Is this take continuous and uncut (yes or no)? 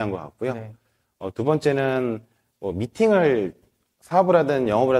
yes